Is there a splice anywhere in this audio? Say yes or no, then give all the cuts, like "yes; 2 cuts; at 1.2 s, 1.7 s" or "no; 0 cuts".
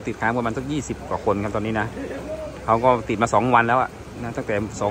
no; 0 cuts